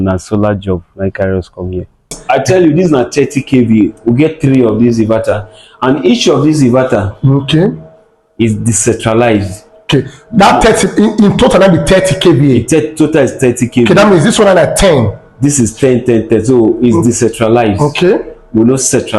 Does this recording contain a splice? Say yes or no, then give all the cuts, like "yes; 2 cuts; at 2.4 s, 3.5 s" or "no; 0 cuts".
yes; 1 cut; at 2.2 s